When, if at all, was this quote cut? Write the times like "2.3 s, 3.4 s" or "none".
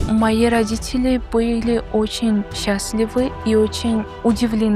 none